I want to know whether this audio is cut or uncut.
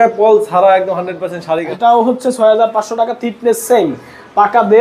cut